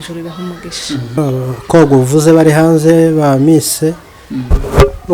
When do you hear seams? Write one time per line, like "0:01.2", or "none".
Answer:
0:01.3